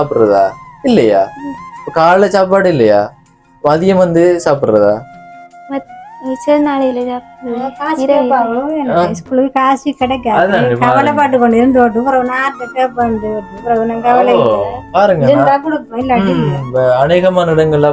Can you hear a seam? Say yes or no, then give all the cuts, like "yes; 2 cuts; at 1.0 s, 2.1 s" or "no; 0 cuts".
no; 0 cuts